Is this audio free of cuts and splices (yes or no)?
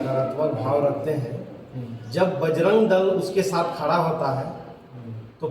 yes